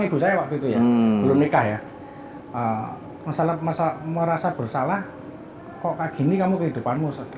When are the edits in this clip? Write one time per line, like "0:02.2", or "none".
none